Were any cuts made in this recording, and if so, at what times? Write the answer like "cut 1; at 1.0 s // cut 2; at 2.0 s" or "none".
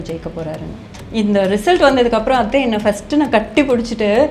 cut 1; at 1.0 s